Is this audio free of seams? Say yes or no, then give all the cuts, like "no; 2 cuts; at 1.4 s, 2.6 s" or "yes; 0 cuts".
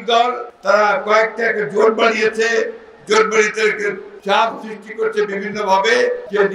yes; 0 cuts